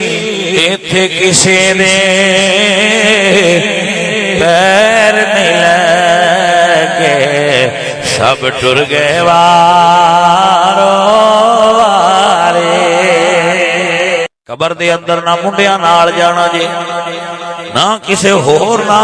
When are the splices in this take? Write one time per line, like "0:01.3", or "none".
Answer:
0:14.3